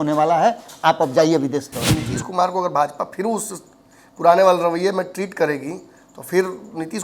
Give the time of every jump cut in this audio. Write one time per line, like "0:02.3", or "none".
0:01.8